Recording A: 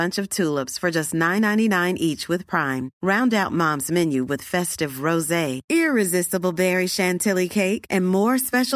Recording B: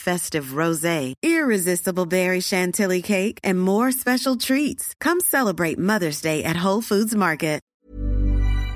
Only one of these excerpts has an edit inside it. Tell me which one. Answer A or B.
B